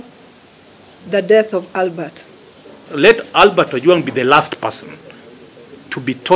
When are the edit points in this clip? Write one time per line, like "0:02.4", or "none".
0:02.9